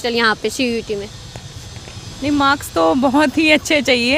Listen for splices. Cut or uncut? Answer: uncut